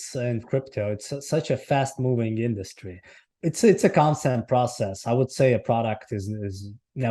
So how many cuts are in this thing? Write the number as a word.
one